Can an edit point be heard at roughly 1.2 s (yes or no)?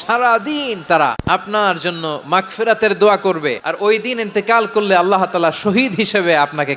yes